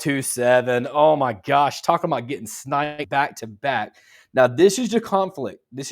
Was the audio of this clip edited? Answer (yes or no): no